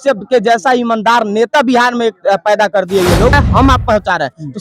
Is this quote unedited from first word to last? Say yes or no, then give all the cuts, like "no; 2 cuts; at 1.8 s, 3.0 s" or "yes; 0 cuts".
no; 1 cut; at 3.3 s